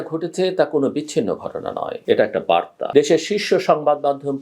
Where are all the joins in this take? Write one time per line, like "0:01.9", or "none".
0:01.9
0:02.8